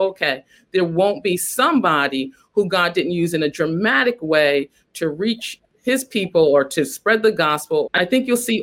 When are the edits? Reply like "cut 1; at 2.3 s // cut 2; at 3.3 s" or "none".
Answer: cut 1; at 5.7 s // cut 2; at 7.8 s